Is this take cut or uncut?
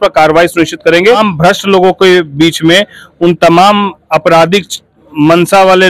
cut